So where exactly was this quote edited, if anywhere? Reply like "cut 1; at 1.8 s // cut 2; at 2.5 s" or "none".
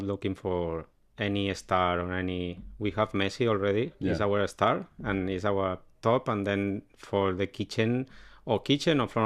none